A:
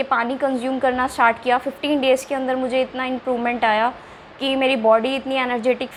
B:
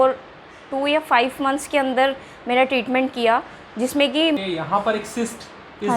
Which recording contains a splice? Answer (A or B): B